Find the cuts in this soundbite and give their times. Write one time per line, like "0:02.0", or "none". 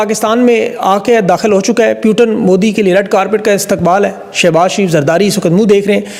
none